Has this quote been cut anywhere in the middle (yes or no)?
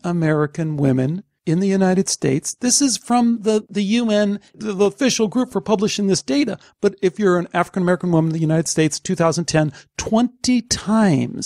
yes